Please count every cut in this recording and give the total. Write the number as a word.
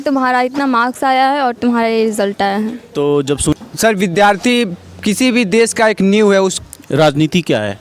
two